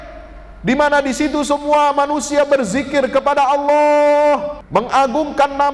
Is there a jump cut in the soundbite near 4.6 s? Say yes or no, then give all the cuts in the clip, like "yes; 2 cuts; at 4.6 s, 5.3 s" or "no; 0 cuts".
yes; 1 cut; at 4.6 s